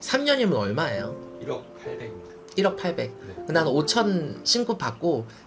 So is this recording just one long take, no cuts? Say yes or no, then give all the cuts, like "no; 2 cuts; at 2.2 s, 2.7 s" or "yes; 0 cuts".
yes; 0 cuts